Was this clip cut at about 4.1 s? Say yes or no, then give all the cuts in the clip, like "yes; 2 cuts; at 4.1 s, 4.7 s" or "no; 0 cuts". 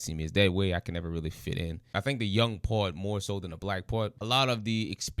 yes; 2 cuts; at 1.8 s, 4.1 s